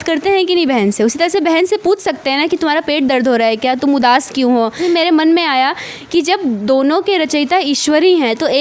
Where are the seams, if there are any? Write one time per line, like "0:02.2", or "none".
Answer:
0:04.8